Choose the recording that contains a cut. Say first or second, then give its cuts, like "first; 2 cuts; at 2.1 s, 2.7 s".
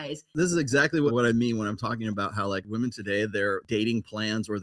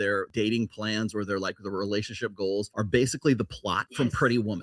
first; 1 cut; at 1.1 s